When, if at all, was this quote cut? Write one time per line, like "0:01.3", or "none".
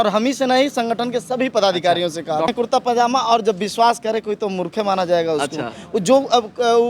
0:02.5

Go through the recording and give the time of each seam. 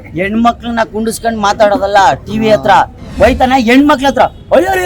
0:03.0

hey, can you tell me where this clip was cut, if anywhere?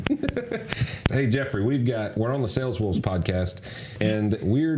0:01.1
0:03.8

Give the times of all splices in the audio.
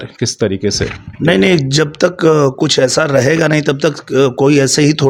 none

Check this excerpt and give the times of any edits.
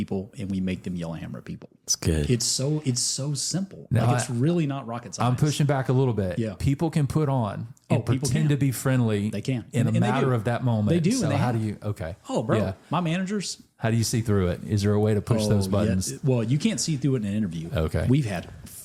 none

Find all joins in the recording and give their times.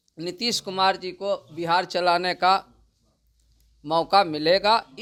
none

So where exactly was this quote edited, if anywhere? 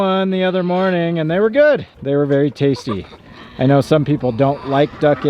0:01.9

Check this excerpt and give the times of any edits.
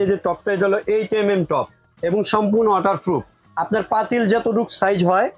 0:01.8
0:03.4

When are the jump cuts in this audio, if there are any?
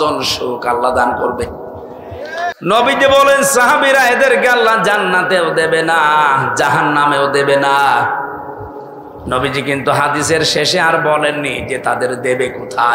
0:02.5

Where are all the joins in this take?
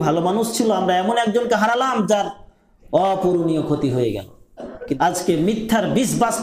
0:05.0

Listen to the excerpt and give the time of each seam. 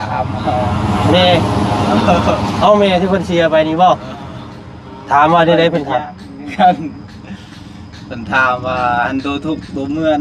none

